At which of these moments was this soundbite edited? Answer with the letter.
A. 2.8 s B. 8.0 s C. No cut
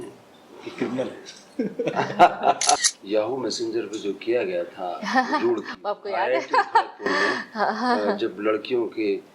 A